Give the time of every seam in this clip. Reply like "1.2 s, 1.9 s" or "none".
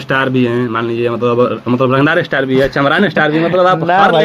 none